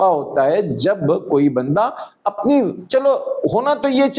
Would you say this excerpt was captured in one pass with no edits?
yes; 0 cuts

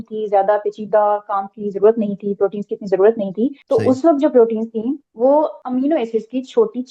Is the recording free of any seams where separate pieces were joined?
no; 3 cuts; at 3.6 s, 5.1 s, 5.6 s

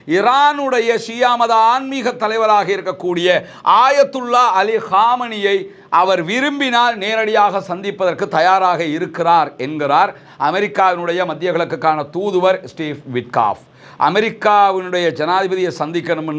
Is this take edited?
no; 0 cuts

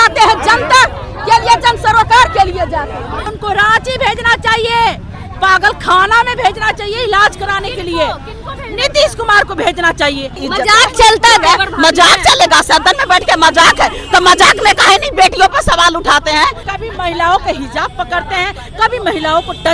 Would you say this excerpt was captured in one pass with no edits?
no; 3 cuts; at 3.2 s, 10.4 s, 16.6 s

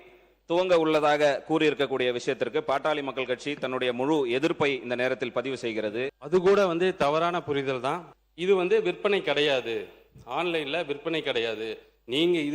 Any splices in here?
yes; 2 cuts; at 6.2 s, 8.1 s

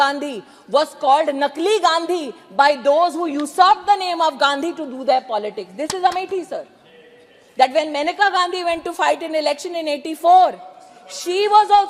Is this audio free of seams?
yes; 0 cuts

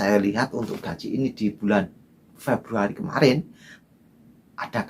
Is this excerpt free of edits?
no; 1 cut; at 3.7 s

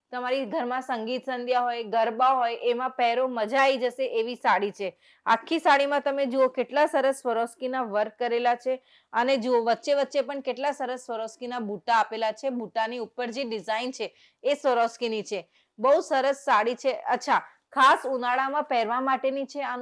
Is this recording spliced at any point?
no; 0 cuts

